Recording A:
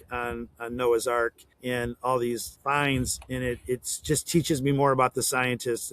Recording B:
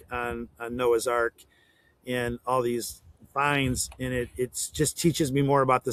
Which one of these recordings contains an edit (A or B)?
A